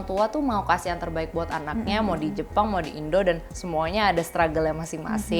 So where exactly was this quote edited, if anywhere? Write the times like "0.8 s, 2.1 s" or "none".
none